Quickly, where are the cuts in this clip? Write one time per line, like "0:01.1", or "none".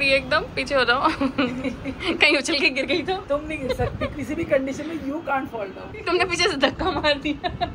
0:05.9